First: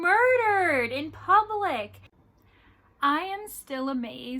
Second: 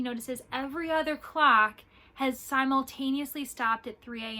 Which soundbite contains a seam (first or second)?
first